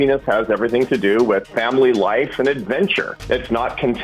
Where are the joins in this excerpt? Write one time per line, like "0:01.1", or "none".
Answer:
0:01.5
0:03.1